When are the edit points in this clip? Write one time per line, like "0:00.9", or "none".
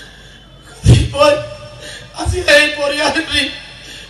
none